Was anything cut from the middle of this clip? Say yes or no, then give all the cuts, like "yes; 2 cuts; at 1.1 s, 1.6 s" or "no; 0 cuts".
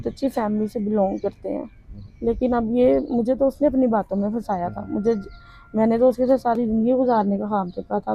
no; 0 cuts